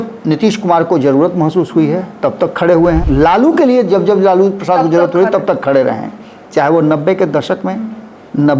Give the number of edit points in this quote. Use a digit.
1